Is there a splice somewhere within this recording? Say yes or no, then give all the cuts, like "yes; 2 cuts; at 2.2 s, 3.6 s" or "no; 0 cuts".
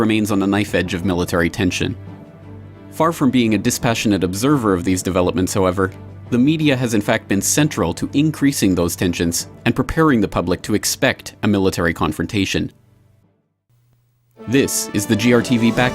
yes; 1 cut; at 11.9 s